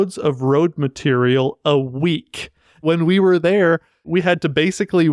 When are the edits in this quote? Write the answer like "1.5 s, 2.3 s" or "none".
2.8 s, 4.1 s

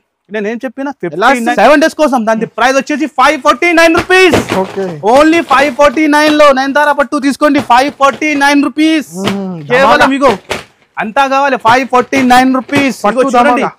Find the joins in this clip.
1.5 s

